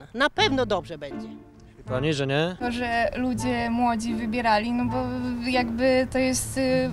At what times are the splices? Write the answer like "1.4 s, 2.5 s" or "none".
2.6 s